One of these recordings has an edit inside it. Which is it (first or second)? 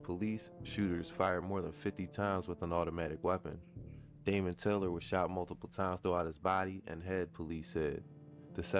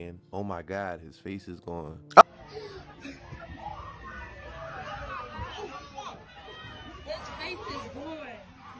second